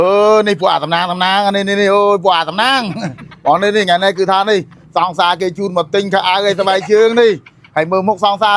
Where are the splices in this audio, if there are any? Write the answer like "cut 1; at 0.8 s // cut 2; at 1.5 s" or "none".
none